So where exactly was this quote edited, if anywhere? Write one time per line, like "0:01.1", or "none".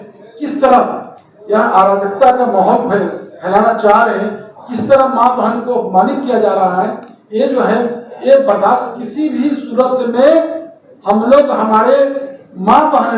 none